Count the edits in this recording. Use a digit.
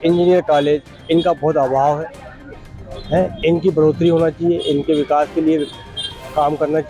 0